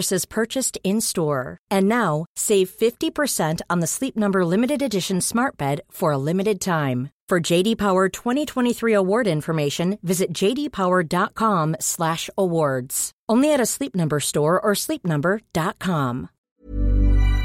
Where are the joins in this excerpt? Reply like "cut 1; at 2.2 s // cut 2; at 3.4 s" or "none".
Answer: cut 1; at 16.5 s